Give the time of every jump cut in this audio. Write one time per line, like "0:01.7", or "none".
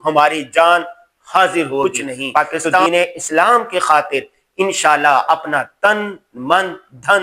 0:02.9

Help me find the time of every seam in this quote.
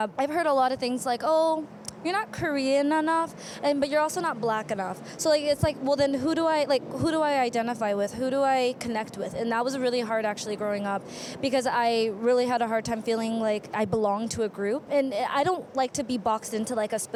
none

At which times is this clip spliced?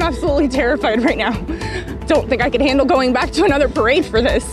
0:01.9

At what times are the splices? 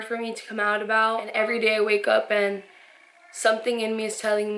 0:01.3

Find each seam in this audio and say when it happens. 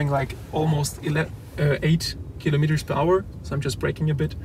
none

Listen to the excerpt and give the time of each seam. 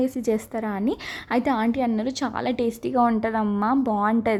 none

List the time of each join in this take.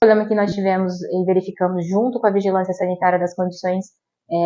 none

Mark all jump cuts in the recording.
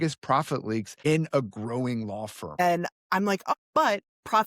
0:00.9
0:02.6
0:03.5

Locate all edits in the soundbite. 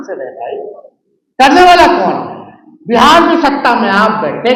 none

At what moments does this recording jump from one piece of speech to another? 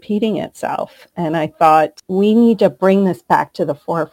0:02.0

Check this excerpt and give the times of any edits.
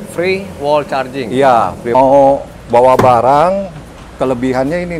0:01.9

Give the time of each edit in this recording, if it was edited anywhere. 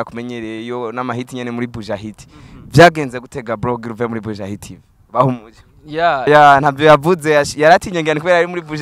0:06.3

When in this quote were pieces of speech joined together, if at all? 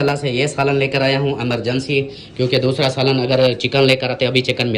none

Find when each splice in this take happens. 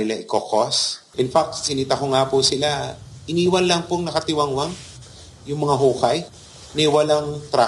none

